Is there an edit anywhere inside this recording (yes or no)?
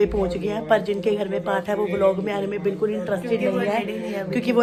no